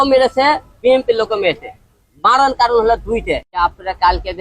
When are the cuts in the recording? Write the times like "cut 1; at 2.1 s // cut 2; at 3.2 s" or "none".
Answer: cut 1; at 3.5 s